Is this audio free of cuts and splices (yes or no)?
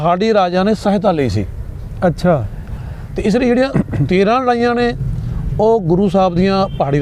no